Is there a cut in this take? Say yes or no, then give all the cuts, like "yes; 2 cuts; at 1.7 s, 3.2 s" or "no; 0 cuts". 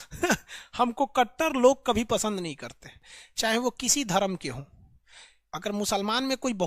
no; 0 cuts